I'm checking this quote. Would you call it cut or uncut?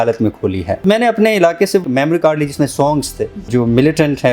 cut